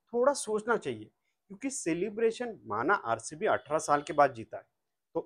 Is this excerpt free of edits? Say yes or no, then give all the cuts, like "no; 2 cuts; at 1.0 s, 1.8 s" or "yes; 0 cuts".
yes; 0 cuts